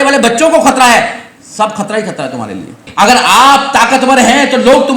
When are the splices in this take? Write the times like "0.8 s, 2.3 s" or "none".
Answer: 2.9 s